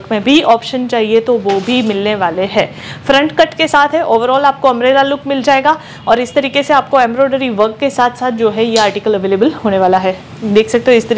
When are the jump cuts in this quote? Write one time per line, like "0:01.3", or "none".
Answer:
none

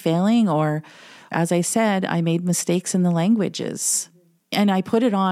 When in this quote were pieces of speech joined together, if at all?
0:01.3
0:04.4

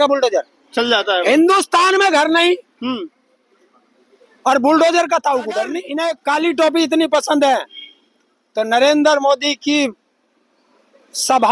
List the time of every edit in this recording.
0:05.9

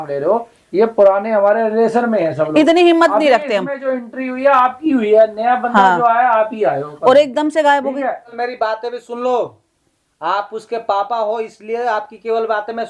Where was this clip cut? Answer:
0:08.3

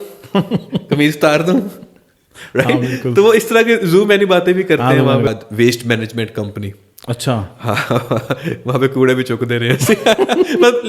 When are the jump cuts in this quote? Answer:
0:05.3

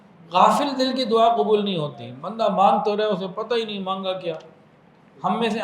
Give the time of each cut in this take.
none

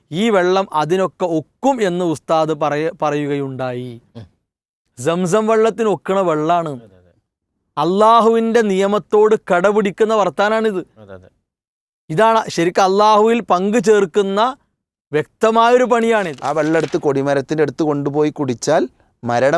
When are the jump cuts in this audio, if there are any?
0:16.4

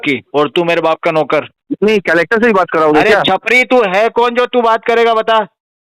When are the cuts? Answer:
0:01.6

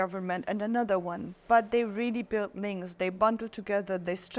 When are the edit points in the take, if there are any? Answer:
none

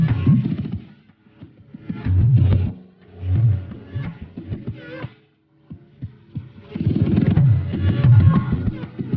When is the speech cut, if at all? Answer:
none

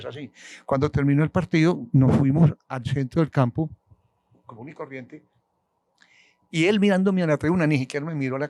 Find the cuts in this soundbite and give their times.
none

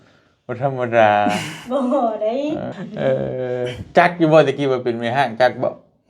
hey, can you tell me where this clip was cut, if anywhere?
0:02.7

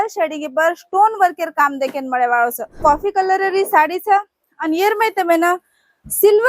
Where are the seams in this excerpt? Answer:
0:02.8

